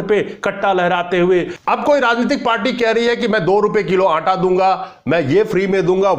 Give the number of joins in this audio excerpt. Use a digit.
1